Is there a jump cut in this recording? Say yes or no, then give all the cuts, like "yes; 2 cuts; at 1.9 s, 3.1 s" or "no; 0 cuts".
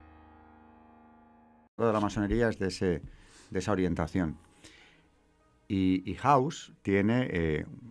no; 0 cuts